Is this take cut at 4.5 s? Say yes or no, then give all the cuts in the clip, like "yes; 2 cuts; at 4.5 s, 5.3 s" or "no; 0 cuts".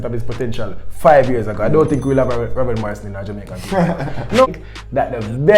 yes; 1 cut; at 4.5 s